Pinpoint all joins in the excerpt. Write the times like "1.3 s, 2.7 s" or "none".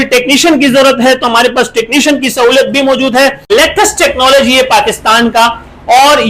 3.5 s